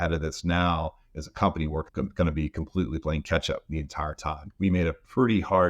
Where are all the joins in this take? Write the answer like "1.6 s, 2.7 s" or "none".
4.4 s